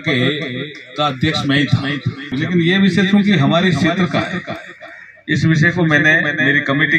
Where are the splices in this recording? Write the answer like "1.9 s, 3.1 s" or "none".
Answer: 2.3 s